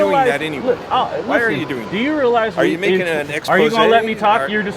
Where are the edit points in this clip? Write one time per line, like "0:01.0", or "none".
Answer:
none

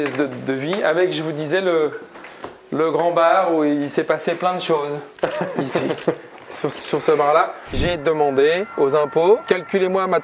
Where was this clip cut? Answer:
0:07.8
0:08.7
0:09.4

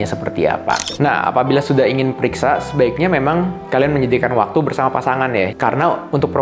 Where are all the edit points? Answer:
0:00.9

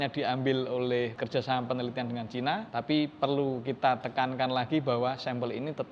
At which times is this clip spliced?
0:01.2
0:02.7

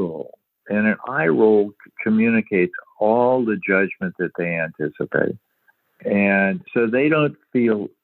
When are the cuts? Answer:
0:01.9
0:05.9

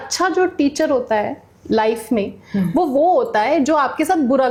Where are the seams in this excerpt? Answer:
none

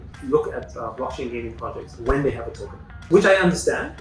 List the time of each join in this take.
0:03.0

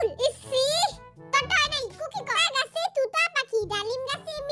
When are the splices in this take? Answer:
0:02.4

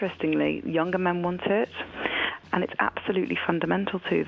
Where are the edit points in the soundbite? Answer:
0:02.3

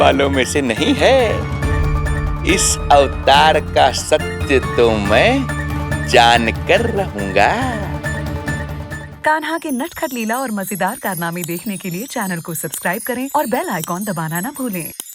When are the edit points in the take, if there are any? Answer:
0:09.1

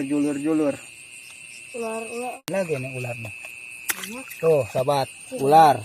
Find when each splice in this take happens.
0:02.5

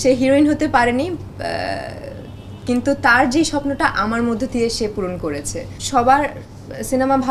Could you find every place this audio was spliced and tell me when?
0:05.8

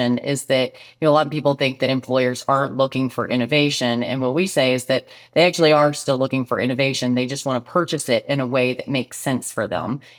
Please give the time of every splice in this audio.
none

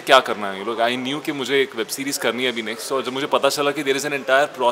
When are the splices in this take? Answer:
none

